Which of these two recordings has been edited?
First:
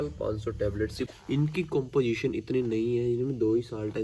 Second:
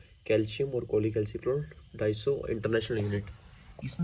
first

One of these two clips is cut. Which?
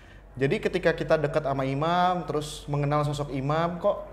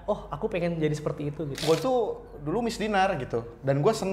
second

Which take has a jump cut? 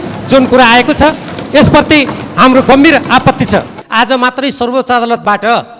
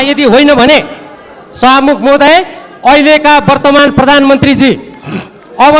first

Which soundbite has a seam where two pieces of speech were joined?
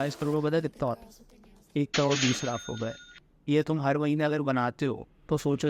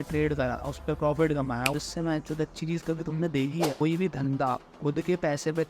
second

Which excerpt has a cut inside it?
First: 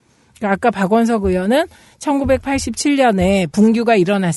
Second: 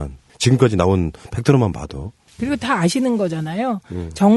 first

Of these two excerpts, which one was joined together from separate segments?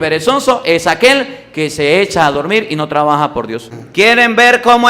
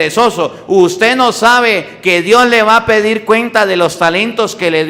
first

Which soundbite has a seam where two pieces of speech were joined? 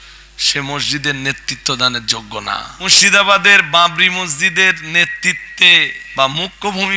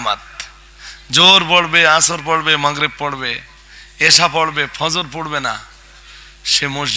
first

